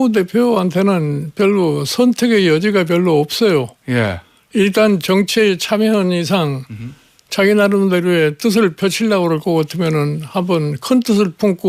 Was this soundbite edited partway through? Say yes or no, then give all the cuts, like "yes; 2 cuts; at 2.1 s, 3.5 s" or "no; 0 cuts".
no; 0 cuts